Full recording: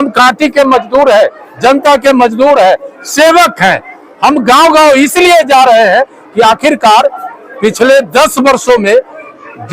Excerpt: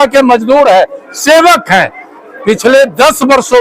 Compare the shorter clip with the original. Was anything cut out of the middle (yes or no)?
yes